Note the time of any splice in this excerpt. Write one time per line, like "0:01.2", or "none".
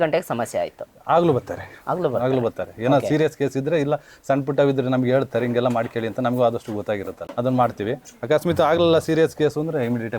0:07.2

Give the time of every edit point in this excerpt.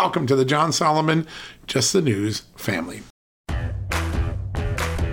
0:03.2

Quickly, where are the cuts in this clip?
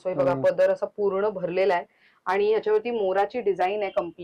none

